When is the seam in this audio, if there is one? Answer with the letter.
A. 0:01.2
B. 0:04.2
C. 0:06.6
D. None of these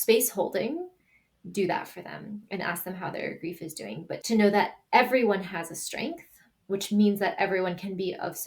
B